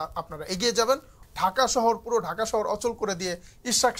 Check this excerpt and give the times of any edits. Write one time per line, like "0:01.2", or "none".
0:01.2